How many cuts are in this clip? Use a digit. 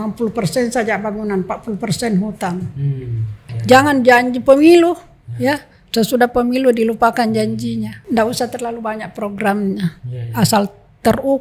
2